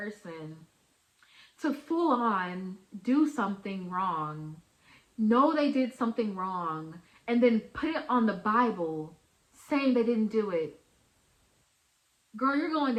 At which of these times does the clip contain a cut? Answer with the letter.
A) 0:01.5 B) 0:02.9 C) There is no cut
C